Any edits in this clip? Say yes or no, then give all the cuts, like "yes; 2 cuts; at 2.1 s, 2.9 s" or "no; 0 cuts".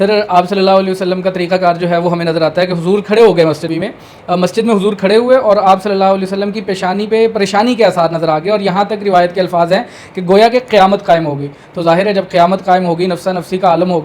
no; 0 cuts